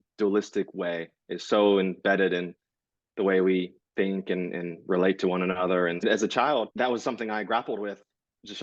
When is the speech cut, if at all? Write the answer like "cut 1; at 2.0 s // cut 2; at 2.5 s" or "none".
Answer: cut 1; at 6.0 s // cut 2; at 6.7 s